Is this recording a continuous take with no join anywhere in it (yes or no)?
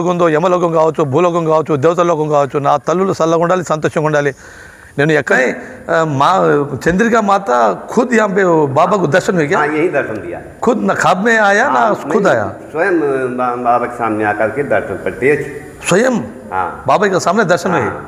no